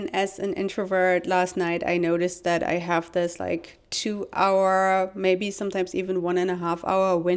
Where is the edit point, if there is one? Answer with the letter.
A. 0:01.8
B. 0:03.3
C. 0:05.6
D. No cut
D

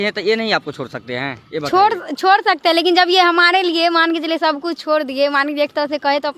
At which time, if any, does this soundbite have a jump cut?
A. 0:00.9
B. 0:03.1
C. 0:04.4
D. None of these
D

